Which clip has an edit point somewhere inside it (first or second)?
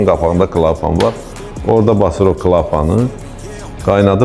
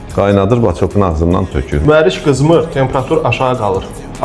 second